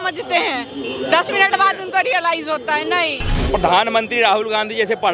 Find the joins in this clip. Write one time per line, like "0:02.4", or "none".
0:03.3